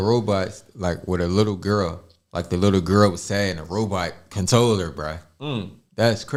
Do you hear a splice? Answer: no; 0 cuts

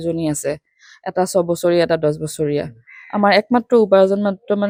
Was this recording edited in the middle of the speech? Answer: no; 0 cuts

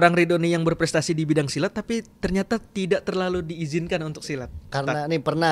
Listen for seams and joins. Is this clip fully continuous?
yes; 0 cuts

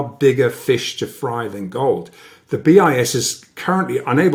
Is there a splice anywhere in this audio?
no; 0 cuts

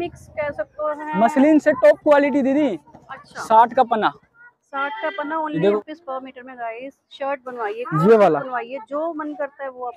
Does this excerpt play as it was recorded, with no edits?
no; 1 cut; at 5.8 s

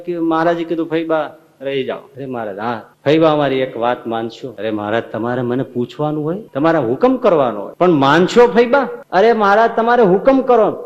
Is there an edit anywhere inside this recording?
yes; 5 cuts; at 2.6 s, 4.5 s, 6.5 s, 7.6 s, 9.0 s

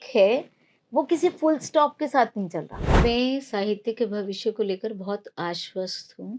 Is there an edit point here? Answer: yes; 1 cut; at 2.8 s

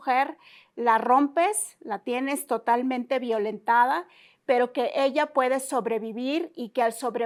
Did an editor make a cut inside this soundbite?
no; 0 cuts

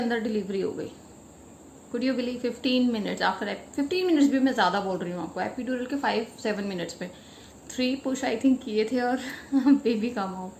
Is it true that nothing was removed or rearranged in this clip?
yes; 0 cuts

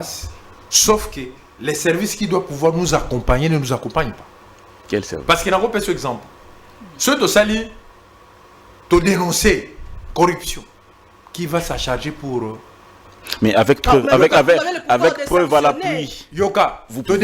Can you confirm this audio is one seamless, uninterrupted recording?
yes; 0 cuts

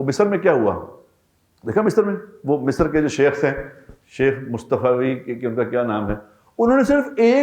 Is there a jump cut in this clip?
no; 0 cuts

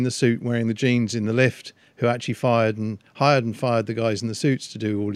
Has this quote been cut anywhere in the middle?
no; 0 cuts

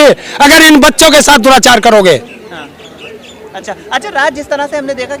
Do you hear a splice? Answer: no; 0 cuts

